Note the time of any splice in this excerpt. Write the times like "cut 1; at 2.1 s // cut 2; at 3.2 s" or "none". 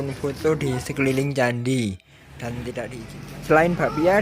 cut 1; at 3.0 s